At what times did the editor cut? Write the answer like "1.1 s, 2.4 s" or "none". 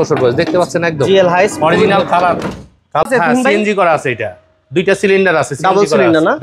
3.1 s